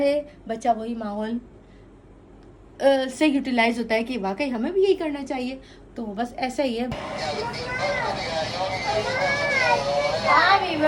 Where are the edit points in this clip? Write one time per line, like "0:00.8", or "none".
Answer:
0:06.9